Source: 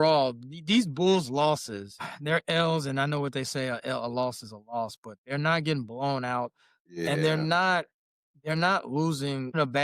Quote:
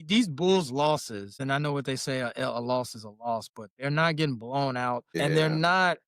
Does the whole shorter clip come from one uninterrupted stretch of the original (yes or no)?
no